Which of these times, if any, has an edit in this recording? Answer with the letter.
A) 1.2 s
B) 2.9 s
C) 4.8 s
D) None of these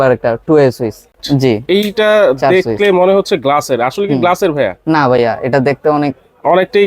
A